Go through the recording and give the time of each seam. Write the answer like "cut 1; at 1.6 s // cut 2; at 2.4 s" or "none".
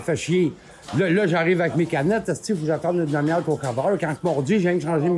none